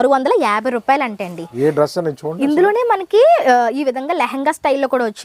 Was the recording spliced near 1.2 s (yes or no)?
no